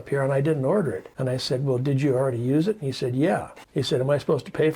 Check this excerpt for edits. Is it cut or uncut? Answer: cut